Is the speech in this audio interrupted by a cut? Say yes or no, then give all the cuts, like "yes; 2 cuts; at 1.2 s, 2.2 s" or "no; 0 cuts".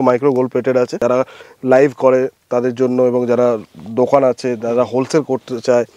yes; 1 cut; at 0.9 s